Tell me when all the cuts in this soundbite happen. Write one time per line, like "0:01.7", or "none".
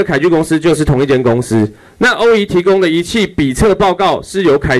none